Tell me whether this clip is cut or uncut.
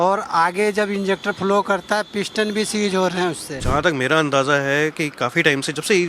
cut